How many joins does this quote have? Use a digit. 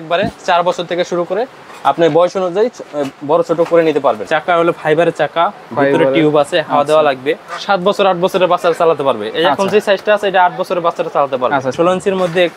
3